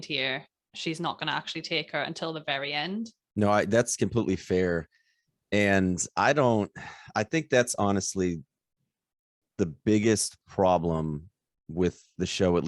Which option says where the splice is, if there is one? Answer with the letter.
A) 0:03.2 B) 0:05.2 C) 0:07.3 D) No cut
A